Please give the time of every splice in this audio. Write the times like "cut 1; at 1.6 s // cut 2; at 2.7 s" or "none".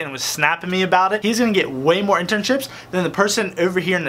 cut 1; at 1.2 s